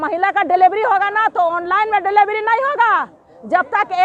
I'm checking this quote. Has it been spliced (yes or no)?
no